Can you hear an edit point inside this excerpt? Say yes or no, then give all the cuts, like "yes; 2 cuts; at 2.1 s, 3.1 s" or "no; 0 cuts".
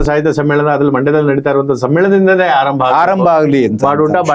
no; 0 cuts